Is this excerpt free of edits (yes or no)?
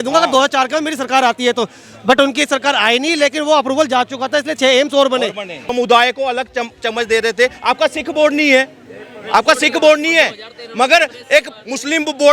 no